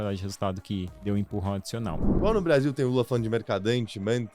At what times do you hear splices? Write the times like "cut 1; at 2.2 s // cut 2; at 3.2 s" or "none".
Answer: cut 1; at 0.9 s // cut 2; at 2.1 s